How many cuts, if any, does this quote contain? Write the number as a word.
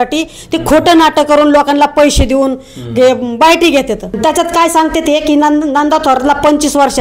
one